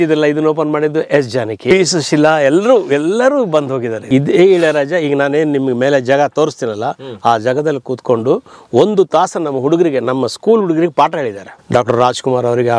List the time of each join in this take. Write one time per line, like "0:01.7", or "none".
0:01.7
0:04.0
0:11.5